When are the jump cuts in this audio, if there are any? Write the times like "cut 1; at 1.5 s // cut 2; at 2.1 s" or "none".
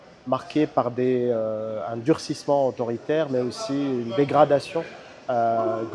none